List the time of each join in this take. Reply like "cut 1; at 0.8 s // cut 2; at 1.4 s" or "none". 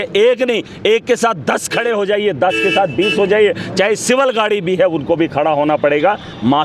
none

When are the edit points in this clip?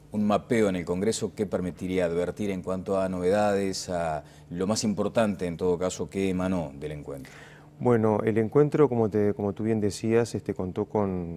none

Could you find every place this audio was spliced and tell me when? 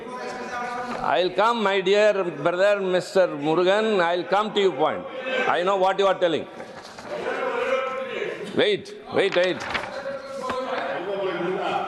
none

